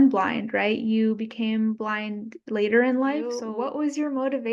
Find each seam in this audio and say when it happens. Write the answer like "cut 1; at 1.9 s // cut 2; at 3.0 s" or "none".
cut 1; at 3.4 s